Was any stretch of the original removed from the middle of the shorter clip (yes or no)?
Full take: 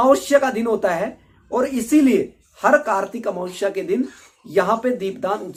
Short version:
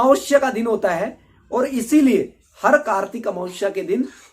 no